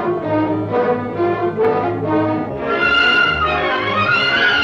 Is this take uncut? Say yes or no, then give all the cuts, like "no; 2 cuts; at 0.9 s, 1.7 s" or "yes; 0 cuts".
yes; 0 cuts